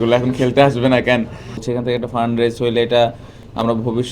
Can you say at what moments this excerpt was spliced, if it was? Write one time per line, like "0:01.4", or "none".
0:01.7